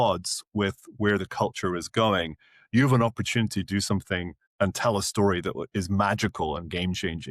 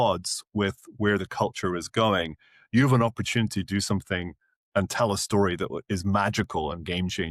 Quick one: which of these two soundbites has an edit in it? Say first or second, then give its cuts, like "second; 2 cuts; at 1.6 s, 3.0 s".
first; 1 cut; at 4.4 s